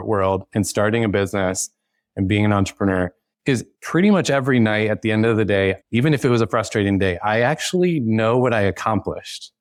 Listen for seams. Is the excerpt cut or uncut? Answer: uncut